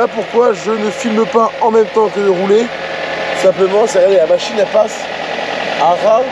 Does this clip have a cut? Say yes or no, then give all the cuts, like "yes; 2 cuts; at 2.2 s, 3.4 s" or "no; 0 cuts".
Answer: no; 0 cuts